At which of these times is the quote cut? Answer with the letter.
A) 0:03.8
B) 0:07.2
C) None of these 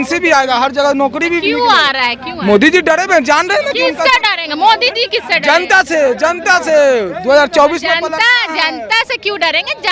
C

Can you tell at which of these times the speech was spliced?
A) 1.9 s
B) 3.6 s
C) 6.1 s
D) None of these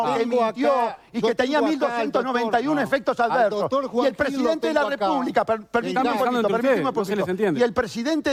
D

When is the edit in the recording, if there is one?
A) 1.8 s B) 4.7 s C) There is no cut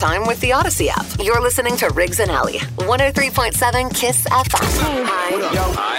B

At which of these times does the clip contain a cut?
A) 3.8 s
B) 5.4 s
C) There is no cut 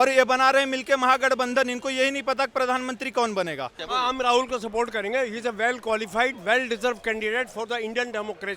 A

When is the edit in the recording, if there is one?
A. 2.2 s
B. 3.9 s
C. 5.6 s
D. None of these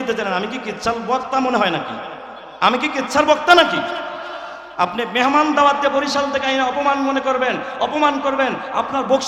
D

